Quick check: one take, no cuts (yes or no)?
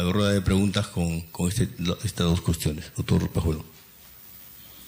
no